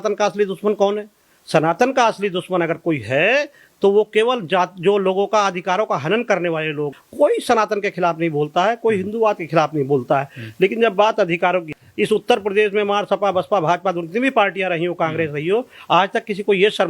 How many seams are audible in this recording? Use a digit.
2